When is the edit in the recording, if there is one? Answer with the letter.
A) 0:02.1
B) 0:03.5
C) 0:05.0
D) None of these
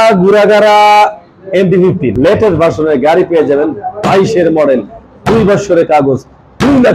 A